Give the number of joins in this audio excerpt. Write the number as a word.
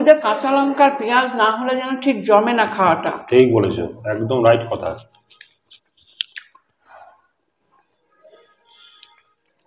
zero